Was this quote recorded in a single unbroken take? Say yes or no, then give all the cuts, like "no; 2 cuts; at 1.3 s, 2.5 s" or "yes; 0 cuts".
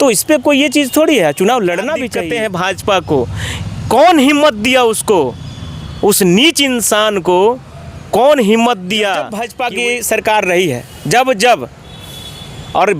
no; 2 cuts; at 2.1 s, 9.5 s